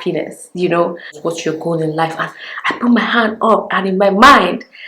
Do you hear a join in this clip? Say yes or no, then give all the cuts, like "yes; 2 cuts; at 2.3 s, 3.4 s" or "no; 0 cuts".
yes; 1 cut; at 1.2 s